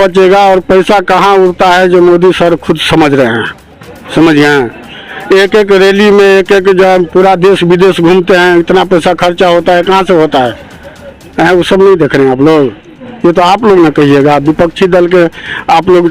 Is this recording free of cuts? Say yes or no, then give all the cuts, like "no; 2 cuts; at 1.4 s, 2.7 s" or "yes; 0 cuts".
yes; 0 cuts